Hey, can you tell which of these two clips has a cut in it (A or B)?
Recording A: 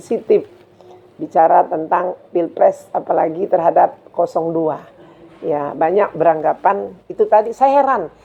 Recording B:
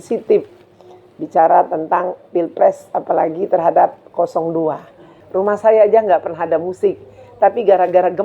B